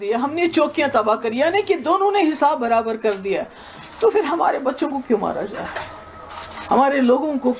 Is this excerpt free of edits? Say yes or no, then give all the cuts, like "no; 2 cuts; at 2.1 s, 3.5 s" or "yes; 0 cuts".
yes; 0 cuts